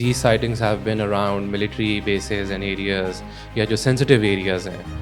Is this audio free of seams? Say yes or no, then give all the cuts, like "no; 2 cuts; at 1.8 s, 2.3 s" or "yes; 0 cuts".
yes; 0 cuts